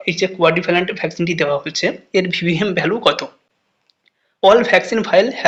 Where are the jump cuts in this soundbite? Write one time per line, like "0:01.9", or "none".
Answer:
none